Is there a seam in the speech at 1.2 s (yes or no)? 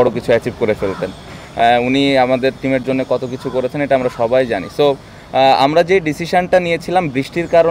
no